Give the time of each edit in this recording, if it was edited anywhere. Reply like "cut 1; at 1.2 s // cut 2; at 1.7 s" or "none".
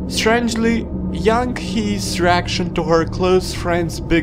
cut 1; at 1.2 s